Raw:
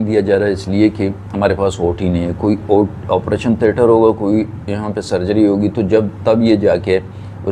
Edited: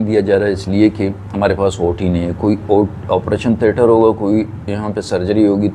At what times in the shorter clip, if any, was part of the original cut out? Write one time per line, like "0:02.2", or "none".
none